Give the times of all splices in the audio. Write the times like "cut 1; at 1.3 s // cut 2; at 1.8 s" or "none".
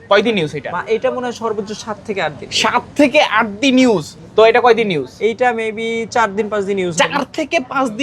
cut 1; at 4.2 s